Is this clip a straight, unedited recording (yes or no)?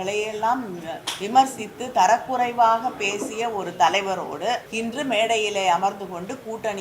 no